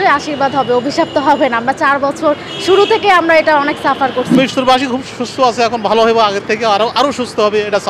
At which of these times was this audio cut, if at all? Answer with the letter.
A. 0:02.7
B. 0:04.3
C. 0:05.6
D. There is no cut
B